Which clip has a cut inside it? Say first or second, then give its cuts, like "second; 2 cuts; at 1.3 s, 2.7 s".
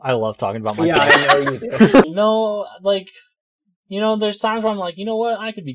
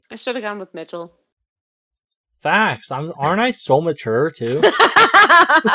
first; 1 cut; at 2.0 s